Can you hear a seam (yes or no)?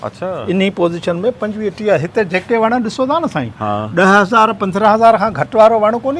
no